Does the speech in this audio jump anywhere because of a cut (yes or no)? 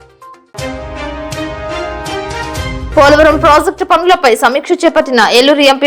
yes